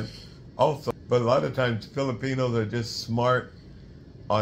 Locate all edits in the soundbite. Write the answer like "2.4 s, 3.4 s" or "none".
0.9 s